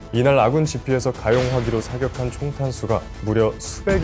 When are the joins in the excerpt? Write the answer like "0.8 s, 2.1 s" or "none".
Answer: 1.2 s, 3.1 s